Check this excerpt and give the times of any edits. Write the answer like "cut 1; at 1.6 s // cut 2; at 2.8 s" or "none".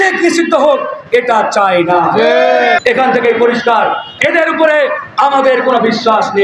cut 1; at 2.8 s // cut 2; at 4.0 s